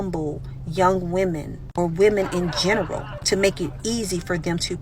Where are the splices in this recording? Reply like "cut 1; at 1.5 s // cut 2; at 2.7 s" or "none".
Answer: cut 1; at 1.5 s